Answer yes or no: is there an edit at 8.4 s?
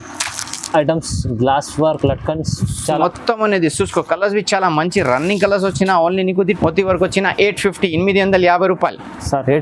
no